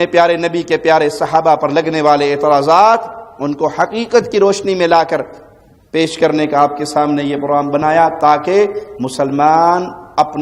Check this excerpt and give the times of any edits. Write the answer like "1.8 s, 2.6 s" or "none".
none